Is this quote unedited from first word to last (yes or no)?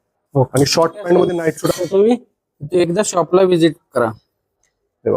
no